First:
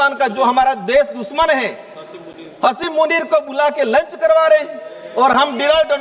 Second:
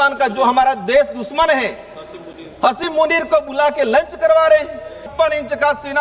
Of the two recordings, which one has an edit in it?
second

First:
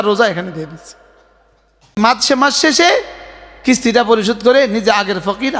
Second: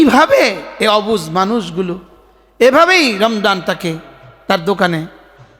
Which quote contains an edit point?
first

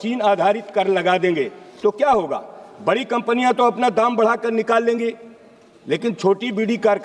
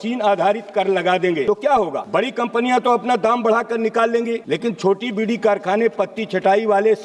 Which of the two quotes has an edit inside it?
second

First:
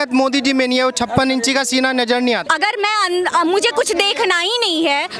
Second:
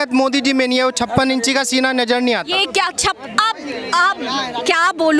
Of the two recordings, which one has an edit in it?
first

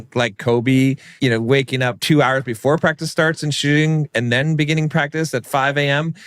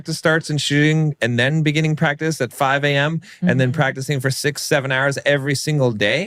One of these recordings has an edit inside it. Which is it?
first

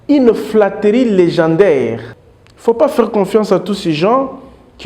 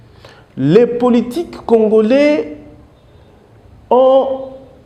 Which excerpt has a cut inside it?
first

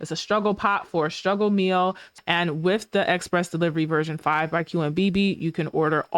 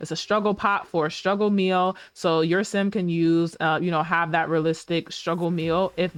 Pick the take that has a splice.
first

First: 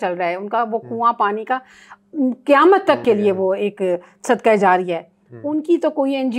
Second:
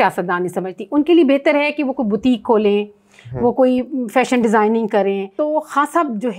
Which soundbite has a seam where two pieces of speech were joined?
second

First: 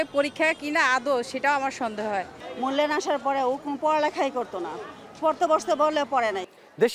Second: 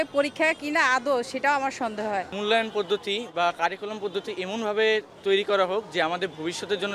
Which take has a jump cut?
second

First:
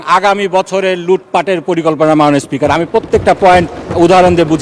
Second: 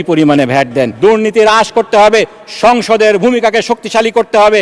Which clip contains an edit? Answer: second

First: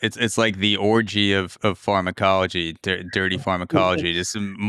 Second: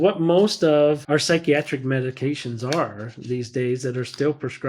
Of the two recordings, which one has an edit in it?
second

